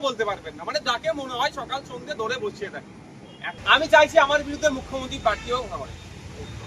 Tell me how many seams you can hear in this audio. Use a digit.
1